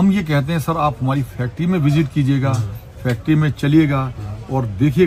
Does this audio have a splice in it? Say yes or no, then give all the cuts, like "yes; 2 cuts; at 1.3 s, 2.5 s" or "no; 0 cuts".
no; 0 cuts